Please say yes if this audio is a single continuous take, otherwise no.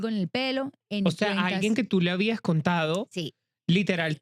yes